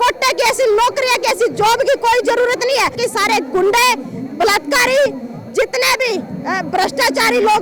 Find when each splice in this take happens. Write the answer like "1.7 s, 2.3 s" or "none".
3.0 s